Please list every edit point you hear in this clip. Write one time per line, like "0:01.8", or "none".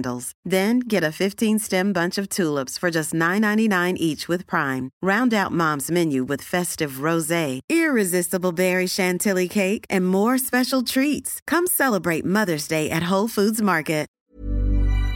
0:14.1

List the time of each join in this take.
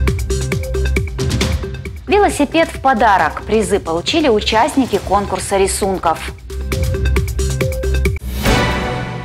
0:06.5
0:07.7

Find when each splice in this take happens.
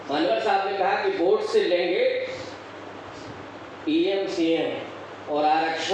none

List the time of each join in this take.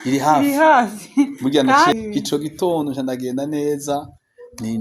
0:01.9

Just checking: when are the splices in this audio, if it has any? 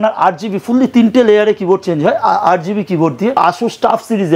0:03.4

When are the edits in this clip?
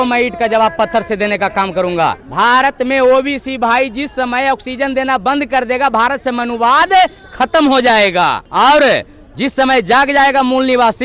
0:02.2
0:08.4

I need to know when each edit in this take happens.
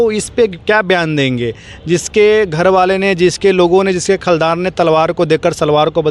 none

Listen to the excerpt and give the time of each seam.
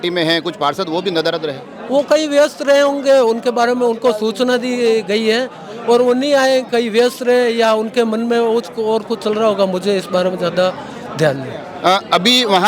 none

